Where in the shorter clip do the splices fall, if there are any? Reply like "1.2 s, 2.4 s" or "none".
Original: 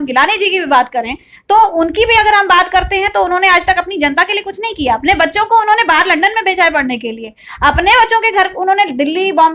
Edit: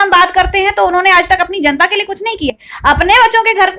2.5 s